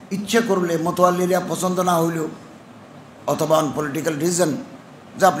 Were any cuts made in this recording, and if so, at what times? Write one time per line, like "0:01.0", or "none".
none